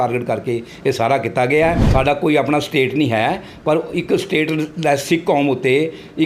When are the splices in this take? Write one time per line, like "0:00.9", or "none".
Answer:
0:01.8